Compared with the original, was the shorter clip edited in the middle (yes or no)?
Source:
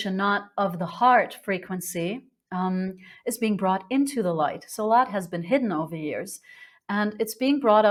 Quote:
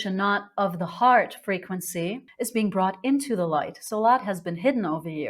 yes